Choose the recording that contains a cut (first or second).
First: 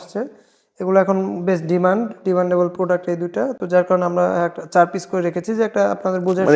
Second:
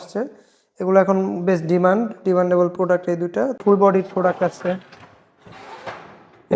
second